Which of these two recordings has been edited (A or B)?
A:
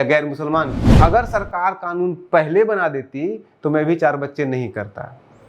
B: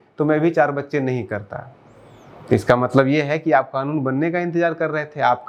A